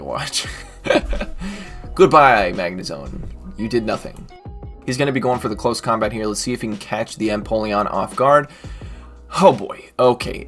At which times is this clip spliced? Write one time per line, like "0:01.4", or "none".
0:04.7